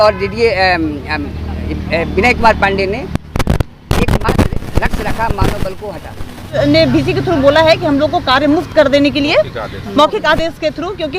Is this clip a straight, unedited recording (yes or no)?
no